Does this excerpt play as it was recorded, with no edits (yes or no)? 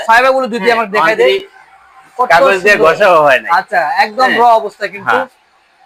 yes